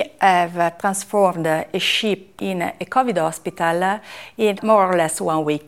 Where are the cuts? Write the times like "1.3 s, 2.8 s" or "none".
0.8 s, 2.3 s, 4.6 s